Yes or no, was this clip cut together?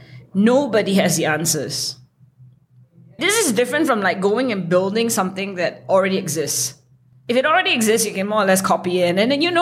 yes